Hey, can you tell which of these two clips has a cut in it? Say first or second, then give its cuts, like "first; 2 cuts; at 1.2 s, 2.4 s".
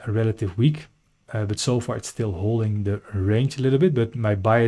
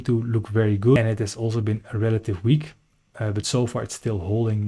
second; 1 cut; at 1.0 s